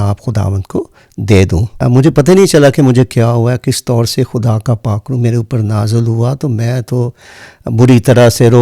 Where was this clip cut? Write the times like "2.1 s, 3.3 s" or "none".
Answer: 1.7 s

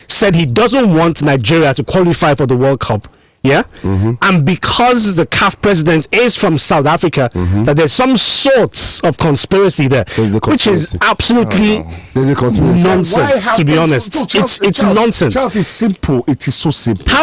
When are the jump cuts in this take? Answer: none

